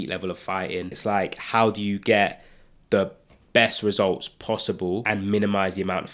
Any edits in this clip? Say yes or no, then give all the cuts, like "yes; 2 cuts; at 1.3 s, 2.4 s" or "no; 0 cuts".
yes; 2 cuts; at 1.0 s, 5.0 s